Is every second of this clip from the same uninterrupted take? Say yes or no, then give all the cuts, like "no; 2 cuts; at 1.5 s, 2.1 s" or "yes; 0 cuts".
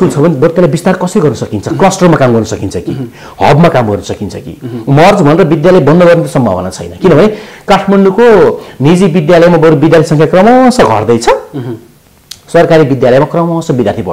yes; 0 cuts